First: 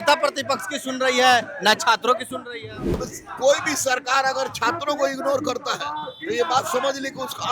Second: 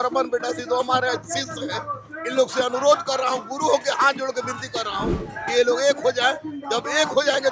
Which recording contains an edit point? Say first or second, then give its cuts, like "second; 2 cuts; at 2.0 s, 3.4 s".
first; 1 cut; at 3.0 s